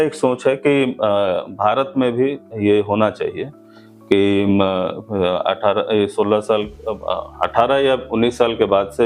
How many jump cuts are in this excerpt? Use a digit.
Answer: 0